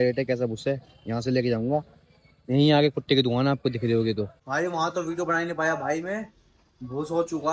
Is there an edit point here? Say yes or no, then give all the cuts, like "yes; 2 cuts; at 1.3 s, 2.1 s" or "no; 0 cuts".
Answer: yes; 1 cut; at 4.4 s